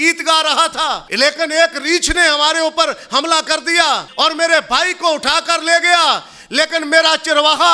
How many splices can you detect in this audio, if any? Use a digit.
2